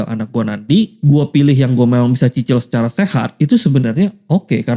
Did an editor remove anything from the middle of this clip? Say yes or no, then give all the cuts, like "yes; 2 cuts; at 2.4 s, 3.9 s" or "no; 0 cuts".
yes; 2 cuts; at 0.9 s, 3.3 s